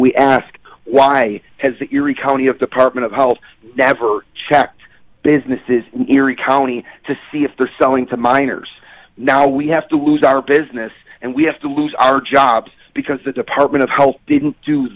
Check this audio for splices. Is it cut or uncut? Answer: uncut